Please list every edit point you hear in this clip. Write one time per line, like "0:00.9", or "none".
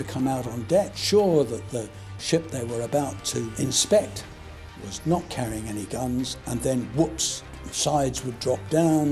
0:00.9